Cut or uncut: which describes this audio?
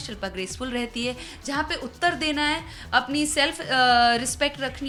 uncut